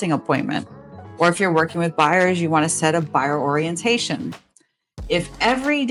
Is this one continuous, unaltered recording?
yes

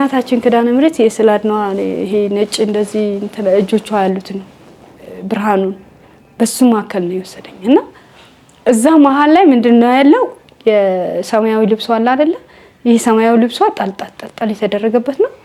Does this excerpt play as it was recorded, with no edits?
yes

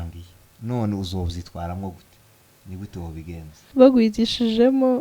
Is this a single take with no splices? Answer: no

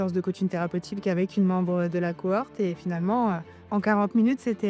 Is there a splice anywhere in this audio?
no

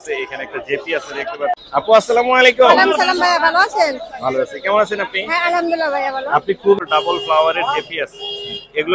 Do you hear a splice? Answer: yes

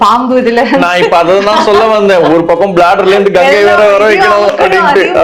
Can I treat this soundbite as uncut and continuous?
yes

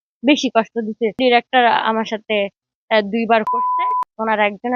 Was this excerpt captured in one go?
no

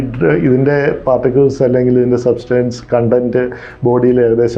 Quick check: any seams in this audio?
no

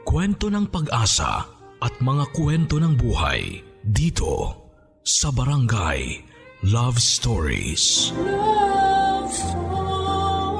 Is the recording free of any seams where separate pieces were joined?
yes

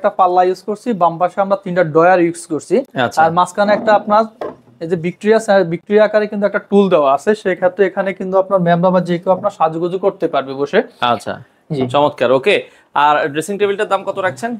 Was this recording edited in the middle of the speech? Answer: no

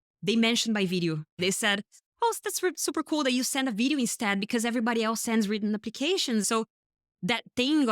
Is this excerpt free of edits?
no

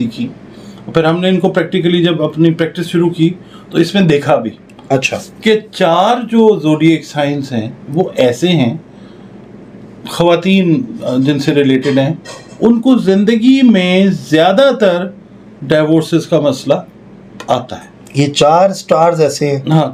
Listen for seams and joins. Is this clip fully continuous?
yes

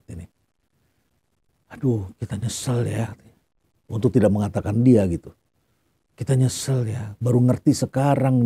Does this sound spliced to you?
no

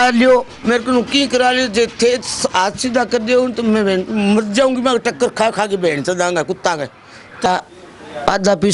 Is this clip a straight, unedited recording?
no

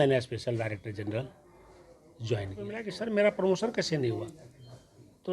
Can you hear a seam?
yes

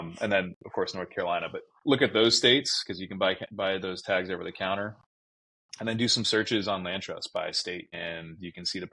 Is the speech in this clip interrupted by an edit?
no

